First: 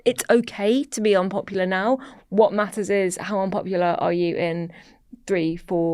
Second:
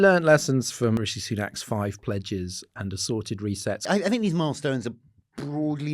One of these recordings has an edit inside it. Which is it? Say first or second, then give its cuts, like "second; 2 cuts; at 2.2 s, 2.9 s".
second; 2 cuts; at 1.0 s, 3.8 s